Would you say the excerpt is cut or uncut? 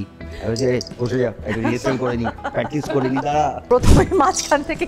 cut